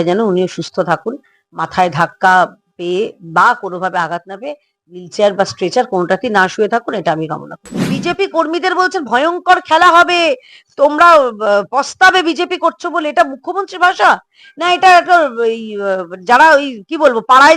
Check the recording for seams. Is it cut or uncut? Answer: cut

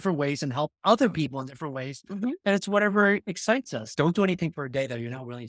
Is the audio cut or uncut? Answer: cut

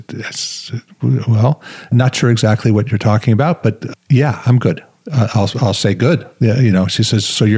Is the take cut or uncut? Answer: cut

